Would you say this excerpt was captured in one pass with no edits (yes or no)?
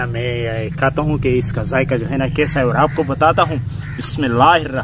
yes